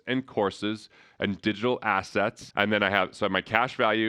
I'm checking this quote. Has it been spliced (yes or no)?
yes